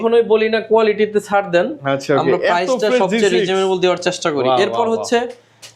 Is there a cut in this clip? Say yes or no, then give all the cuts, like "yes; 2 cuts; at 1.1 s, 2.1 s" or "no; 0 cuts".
no; 0 cuts